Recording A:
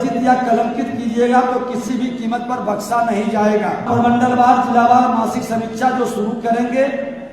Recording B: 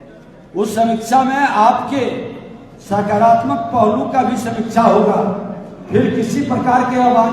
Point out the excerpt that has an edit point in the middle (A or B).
A